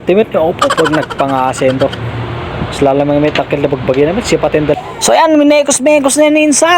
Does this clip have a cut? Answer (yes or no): yes